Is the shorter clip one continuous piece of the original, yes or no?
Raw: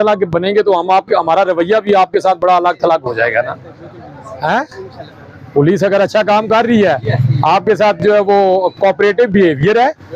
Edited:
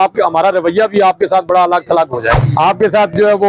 no